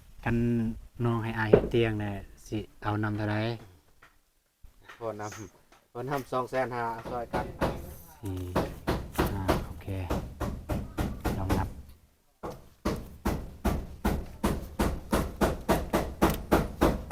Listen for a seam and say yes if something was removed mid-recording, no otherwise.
yes